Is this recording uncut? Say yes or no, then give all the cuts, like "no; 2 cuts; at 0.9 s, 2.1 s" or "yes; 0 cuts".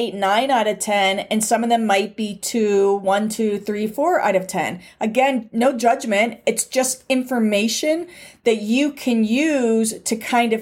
yes; 0 cuts